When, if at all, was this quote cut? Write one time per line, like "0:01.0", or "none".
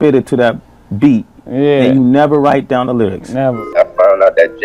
0:03.6